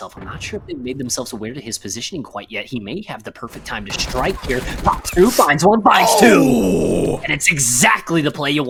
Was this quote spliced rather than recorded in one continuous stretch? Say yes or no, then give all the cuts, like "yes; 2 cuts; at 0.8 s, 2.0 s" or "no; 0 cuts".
no; 0 cuts